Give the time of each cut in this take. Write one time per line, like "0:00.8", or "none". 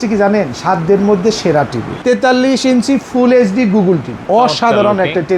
0:01.8
0:04.2